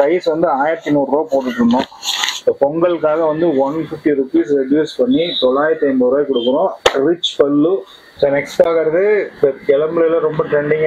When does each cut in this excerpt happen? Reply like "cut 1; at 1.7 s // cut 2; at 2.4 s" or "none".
cut 1; at 8.0 s